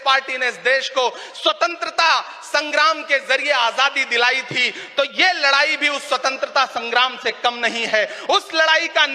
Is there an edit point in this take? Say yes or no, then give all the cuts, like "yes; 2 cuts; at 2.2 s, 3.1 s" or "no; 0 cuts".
no; 0 cuts